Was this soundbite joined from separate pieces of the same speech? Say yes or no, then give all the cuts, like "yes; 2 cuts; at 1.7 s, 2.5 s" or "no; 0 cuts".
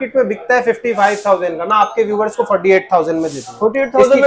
no; 0 cuts